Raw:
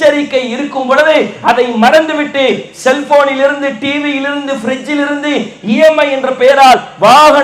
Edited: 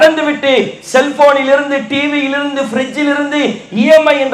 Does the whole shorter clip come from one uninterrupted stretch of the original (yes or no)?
yes